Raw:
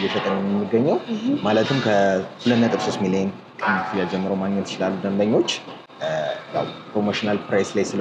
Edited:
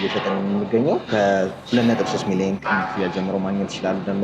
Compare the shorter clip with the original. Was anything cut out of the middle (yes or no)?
yes